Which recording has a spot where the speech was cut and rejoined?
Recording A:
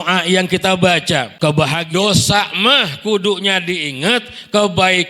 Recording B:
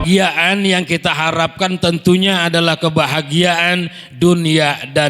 A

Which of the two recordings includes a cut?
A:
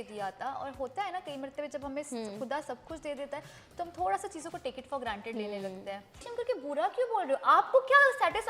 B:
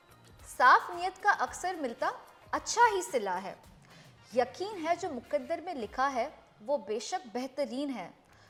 A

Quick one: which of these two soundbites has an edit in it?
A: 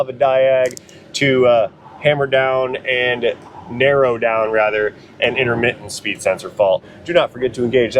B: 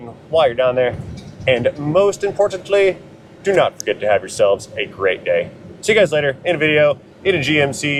A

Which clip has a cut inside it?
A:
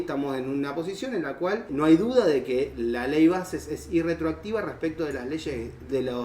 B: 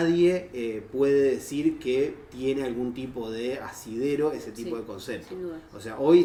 A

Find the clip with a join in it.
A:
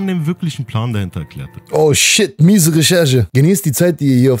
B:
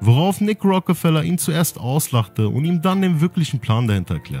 A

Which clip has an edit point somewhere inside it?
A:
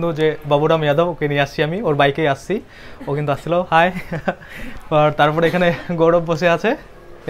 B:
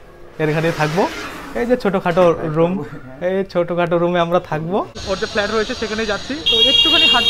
B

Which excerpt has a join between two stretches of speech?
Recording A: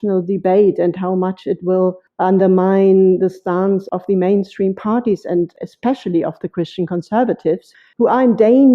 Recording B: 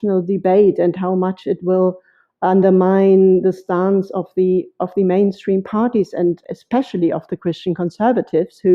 A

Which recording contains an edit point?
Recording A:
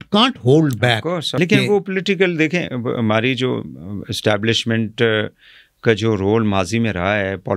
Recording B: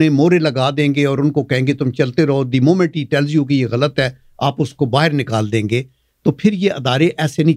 A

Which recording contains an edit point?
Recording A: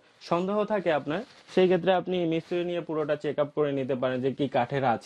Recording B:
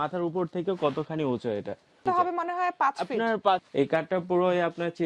B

